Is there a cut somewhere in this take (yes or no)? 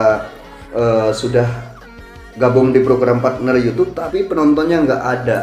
yes